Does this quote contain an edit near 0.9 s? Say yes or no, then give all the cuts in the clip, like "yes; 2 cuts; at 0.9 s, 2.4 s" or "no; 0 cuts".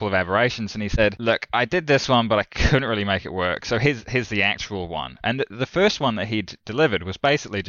yes; 1 cut; at 0.9 s